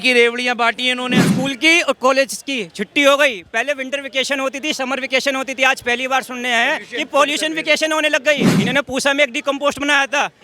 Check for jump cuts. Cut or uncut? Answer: cut